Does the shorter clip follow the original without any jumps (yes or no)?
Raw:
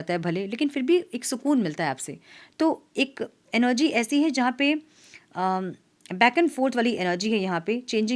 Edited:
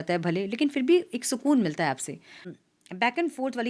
no